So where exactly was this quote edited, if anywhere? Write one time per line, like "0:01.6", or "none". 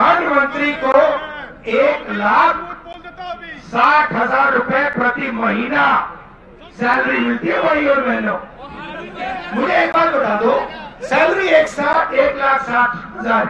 none